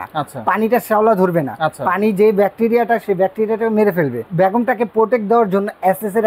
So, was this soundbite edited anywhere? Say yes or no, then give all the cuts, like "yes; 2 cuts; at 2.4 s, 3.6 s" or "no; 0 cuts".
yes; 1 cut; at 4.3 s